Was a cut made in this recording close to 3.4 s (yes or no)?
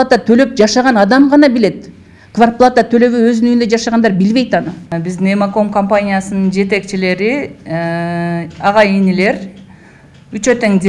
no